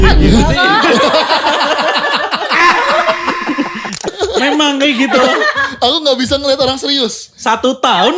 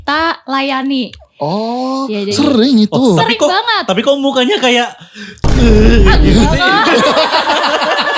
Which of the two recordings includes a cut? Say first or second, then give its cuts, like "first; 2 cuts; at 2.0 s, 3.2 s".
first; 1 cut; at 4.1 s